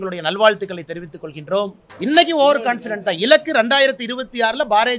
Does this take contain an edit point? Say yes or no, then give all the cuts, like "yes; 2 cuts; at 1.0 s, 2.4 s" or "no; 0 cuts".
yes; 1 cut; at 1.8 s